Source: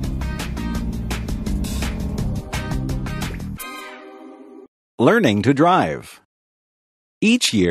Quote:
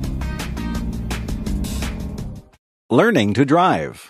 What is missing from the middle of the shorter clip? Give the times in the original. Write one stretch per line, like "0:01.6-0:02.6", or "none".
0:02.4-0:04.5